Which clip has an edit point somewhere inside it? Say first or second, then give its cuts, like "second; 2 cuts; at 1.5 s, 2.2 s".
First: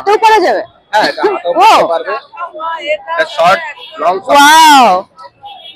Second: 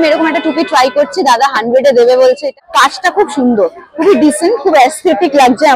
second; 1 cut; at 2.6 s